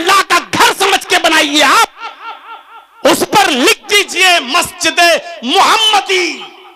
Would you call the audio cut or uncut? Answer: uncut